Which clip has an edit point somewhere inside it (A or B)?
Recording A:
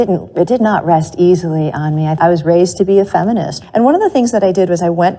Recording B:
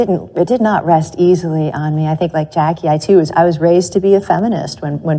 A